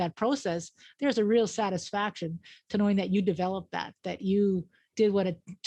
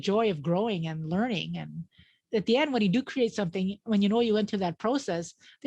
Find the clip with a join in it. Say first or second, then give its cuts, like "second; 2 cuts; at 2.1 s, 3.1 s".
second; 1 cut; at 2.2 s